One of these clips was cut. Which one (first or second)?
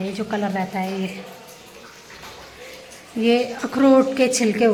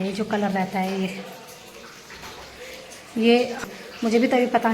second